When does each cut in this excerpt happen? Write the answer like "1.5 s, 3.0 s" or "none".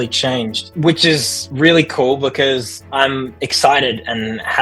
none